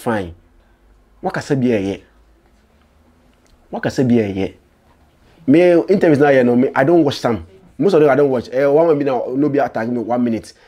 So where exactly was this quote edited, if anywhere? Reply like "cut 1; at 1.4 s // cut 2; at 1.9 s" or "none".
none